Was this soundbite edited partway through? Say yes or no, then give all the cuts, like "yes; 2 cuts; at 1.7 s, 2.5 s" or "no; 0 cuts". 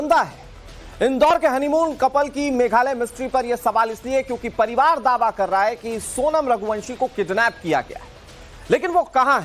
yes; 1 cut; at 3.8 s